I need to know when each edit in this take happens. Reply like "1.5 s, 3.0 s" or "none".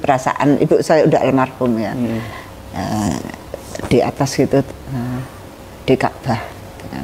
none